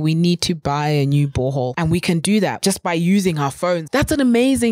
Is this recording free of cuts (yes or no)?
no